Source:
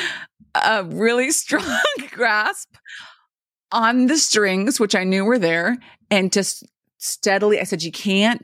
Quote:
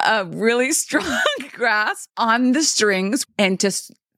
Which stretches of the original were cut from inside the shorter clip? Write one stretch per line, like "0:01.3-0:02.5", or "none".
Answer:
0:02.6-0:03.6
0:04.8-0:05.9